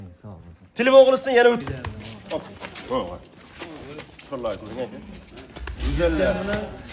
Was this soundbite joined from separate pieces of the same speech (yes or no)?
yes